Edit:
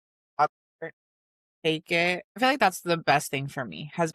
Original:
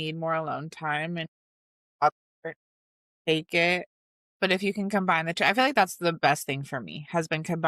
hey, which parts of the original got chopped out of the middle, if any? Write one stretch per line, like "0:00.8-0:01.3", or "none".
0:04.0-0:05.5